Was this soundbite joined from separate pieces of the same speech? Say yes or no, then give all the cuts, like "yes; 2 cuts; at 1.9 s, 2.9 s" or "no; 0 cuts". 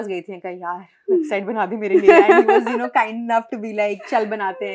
no; 0 cuts